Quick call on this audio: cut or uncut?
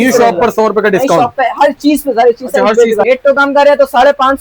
cut